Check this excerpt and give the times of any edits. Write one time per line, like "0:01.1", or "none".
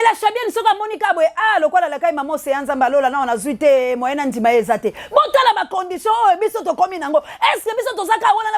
none